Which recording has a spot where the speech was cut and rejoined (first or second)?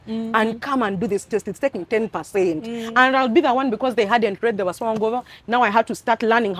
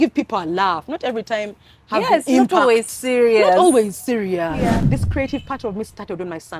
second